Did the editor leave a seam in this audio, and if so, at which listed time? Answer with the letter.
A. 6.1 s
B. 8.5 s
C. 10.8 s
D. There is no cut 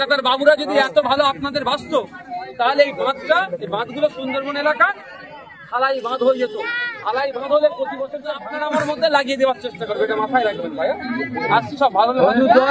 B